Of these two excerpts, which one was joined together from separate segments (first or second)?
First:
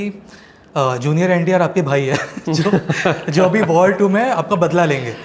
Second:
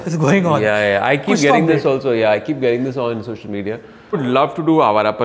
second